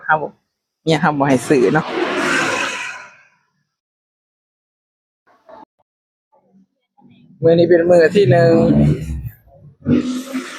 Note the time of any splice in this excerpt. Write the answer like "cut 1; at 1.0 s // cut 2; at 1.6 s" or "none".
none